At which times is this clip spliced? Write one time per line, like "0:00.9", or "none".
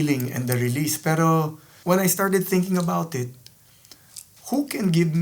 0:01.7

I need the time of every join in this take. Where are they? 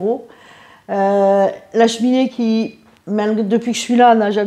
none

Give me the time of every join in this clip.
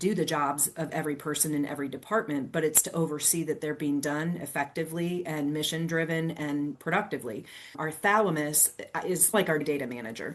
none

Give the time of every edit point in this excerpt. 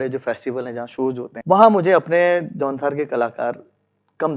0:01.3

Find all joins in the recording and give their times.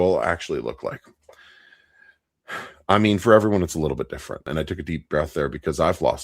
0:04.5

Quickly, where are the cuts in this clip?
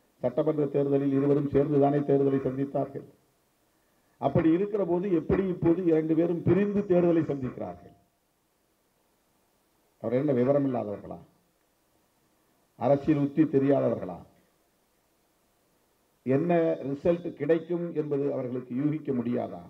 none

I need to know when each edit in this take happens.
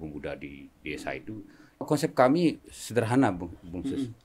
0:01.9

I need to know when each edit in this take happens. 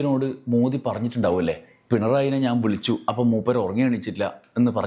none

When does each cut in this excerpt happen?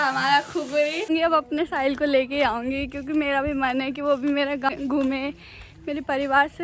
0:01.1
0:04.7

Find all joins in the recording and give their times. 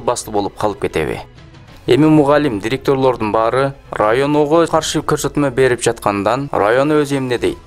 none

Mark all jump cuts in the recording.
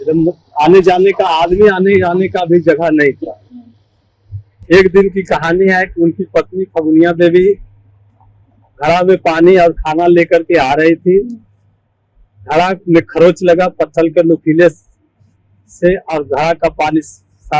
none

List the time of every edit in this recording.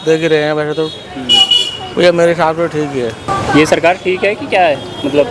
0:03.2

